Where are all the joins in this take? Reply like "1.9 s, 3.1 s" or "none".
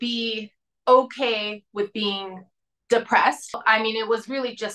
3.6 s

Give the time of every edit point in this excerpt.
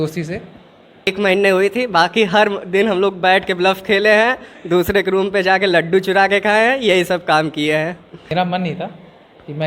1.1 s, 8.3 s

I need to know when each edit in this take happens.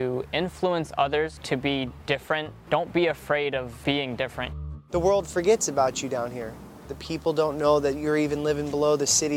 1.4 s, 2.5 s, 3.7 s, 4.6 s, 7.0 s

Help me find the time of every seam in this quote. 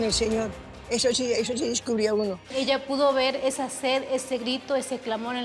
2.5 s

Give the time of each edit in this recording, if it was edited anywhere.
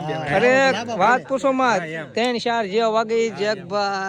none

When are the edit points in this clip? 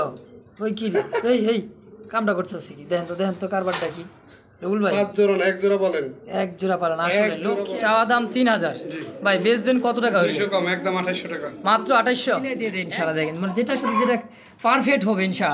7.6 s, 12.7 s

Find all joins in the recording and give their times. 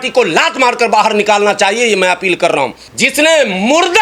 2.8 s

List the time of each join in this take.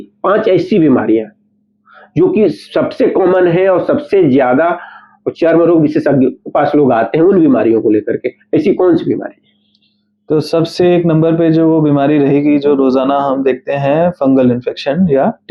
none

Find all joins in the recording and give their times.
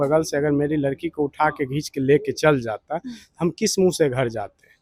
none

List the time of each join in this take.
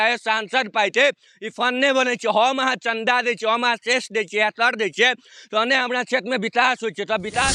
none

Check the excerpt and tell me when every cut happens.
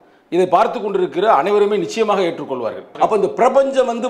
2.9 s

